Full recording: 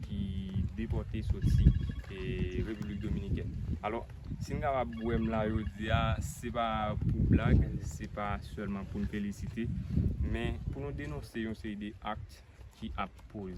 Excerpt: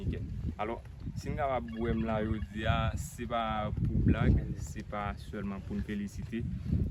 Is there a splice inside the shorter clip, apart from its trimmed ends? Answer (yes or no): no